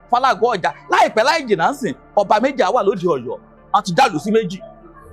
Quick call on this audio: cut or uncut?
cut